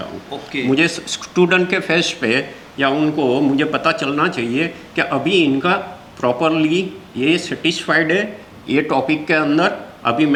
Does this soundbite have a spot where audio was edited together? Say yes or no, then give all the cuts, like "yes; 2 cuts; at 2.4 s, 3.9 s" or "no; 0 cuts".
no; 0 cuts